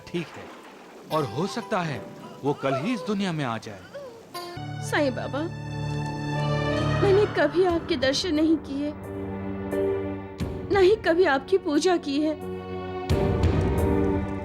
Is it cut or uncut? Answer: cut